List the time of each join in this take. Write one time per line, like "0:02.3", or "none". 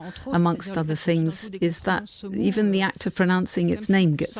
0:02.3